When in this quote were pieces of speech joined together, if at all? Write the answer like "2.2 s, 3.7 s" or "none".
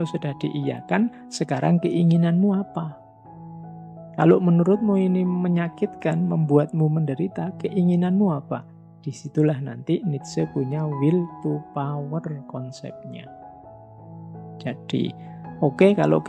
none